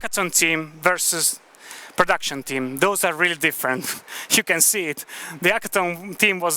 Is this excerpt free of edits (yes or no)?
yes